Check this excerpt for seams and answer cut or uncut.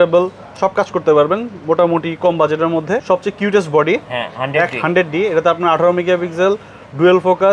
cut